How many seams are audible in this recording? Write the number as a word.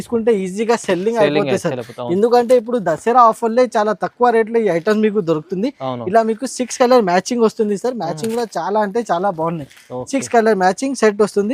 zero